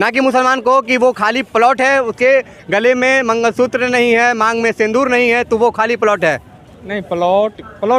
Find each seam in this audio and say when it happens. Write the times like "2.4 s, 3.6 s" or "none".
none